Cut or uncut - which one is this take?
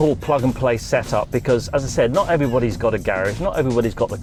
uncut